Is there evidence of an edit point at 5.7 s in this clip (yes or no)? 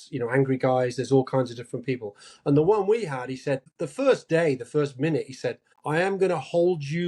yes